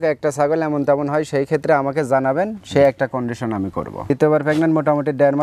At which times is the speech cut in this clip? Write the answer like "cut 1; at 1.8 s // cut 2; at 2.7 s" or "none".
cut 1; at 4.0 s